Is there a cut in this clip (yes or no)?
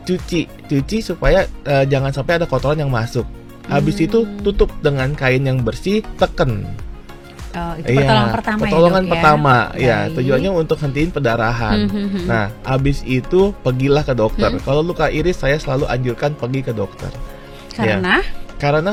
no